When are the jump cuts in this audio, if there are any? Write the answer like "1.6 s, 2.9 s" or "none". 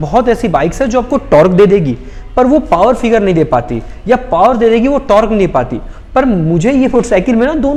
none